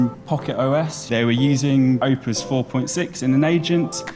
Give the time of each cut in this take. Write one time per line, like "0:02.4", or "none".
0:01.0
0:02.0